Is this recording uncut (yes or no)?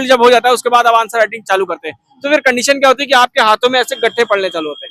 yes